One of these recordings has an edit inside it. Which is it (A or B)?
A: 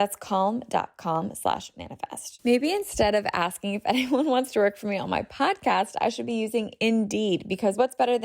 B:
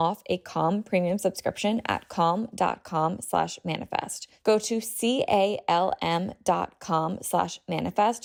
A